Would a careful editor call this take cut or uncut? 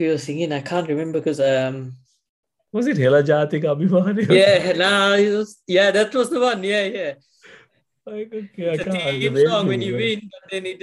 uncut